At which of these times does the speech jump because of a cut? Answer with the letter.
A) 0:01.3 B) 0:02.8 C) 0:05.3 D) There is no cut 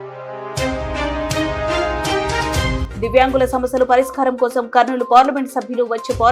B